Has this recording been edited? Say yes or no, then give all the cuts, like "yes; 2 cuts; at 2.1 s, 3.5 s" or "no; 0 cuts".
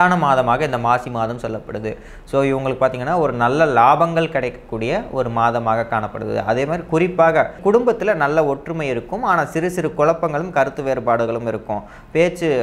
yes; 1 cut; at 7.6 s